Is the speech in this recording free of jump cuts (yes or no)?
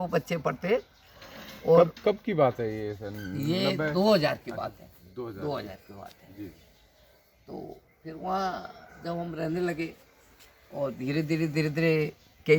yes